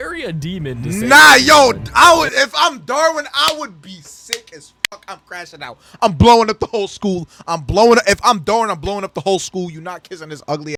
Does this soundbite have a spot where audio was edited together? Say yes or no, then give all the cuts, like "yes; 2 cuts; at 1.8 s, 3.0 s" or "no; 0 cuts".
no; 0 cuts